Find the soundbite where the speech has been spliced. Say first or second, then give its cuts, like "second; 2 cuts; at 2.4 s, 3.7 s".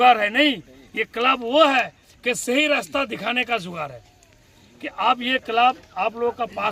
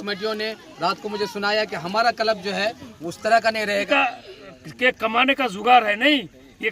second; 1 cut; at 3.9 s